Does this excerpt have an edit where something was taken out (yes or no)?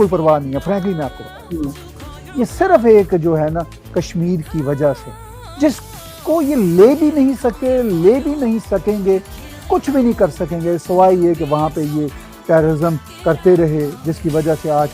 yes